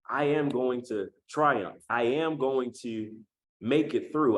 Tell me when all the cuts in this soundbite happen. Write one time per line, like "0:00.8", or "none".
0:01.2
0:01.9